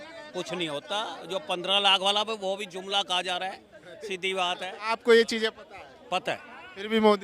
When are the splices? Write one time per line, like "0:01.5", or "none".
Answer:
0:04.8